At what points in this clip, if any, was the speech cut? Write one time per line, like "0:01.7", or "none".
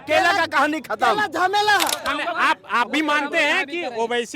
0:02.0